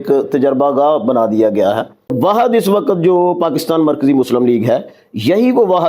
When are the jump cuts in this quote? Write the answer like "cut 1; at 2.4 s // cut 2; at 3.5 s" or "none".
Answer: cut 1; at 2.1 s

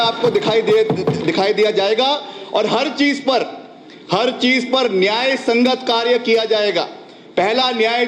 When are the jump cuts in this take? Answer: none

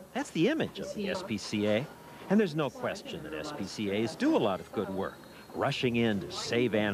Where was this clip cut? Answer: none

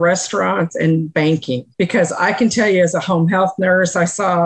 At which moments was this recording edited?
cut 1; at 1.7 s

